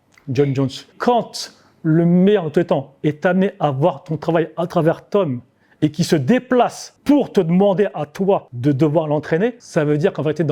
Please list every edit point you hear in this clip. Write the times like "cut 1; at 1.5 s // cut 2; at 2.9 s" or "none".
cut 1; at 0.9 s // cut 2; at 6.9 s // cut 3; at 8.5 s // cut 4; at 9.6 s